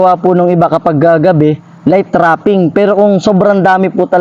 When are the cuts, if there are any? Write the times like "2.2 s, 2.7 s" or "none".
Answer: none